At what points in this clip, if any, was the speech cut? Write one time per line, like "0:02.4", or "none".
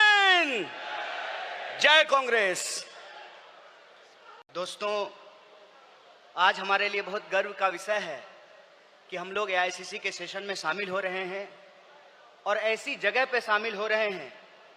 0:04.4